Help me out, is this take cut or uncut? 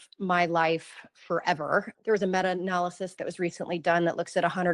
cut